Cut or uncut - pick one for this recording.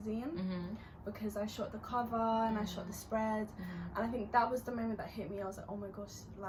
uncut